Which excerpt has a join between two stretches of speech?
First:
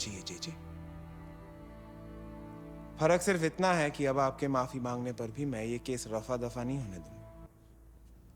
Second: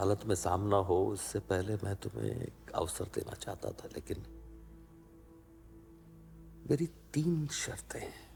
first; 1 cut; at 7.5 s

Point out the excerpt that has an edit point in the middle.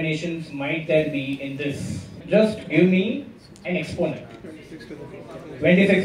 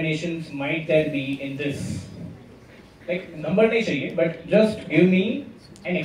first; 2 cuts; at 2.2 s, 4.4 s

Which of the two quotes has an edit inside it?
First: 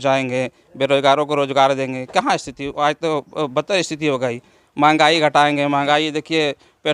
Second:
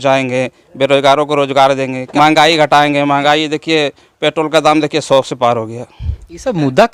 second; 1 cut; at 2.0 s

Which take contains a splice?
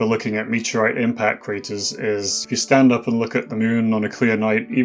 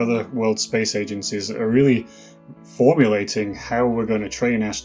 first; 1 cut; at 2.4 s

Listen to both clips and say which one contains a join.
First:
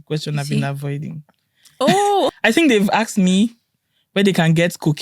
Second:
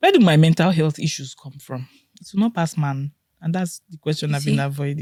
first; 1 cut; at 2.4 s

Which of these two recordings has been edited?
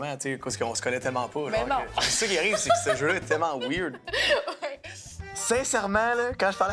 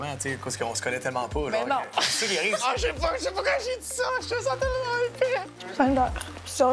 second; 2 cuts; at 2.6 s, 5.5 s

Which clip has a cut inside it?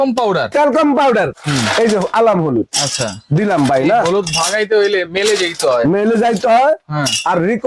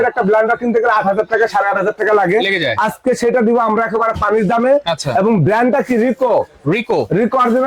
first; 1 cut; at 1.3 s

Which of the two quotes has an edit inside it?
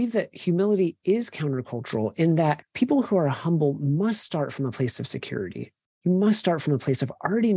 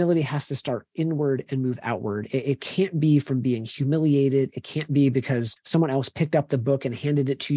first; 1 cut; at 2.7 s

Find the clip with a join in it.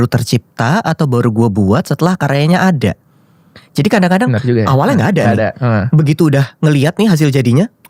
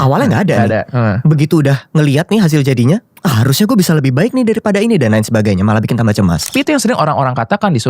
second; 1 cut; at 6.5 s

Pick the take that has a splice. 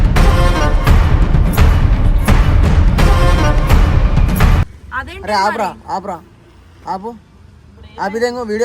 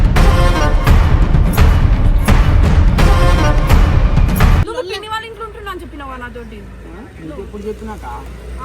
second; 1 cut; at 4.7 s

